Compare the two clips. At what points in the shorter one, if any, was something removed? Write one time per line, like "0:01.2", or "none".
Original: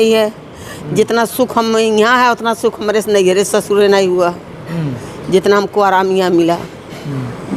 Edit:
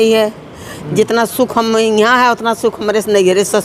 none

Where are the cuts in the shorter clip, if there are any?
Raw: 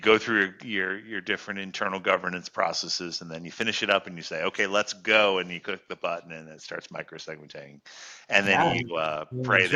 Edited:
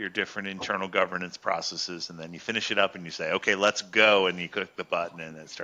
none

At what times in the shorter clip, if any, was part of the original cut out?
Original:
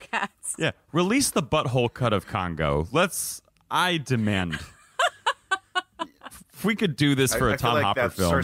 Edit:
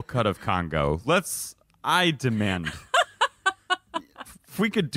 0:02.7

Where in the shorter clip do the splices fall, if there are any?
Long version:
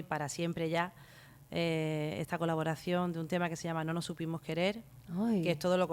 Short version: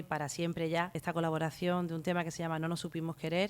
0:01.0

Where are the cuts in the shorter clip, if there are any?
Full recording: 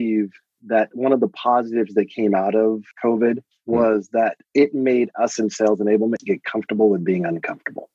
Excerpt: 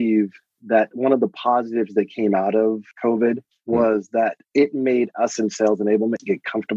none

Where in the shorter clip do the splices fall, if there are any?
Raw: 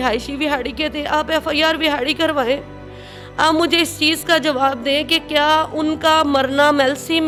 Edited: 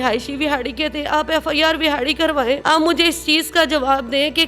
0:02.6

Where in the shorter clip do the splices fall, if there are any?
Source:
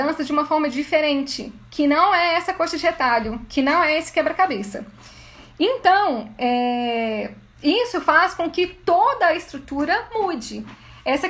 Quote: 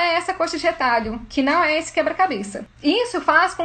0:02.6

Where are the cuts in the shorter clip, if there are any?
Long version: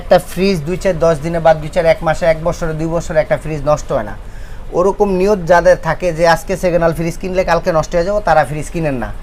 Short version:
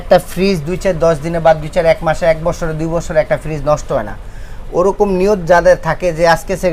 none

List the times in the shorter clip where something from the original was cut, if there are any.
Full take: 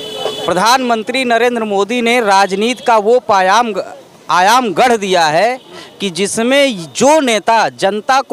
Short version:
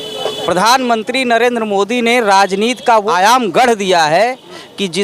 0:03.1

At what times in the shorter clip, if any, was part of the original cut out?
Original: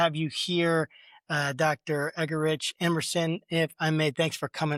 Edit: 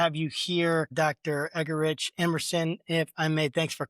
0:00.9

